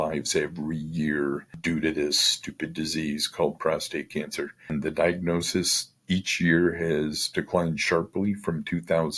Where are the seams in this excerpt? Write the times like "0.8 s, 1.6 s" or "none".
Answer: 1.5 s, 4.7 s